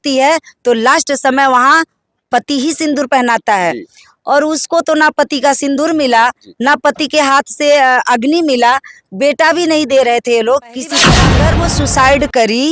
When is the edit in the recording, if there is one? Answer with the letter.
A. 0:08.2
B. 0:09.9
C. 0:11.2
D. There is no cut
C